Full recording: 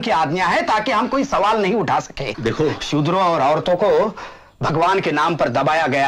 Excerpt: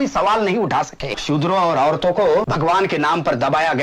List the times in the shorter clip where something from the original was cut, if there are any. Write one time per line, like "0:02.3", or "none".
0:01.2
0:02.5